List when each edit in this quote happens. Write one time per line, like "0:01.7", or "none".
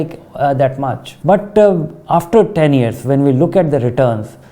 0:01.1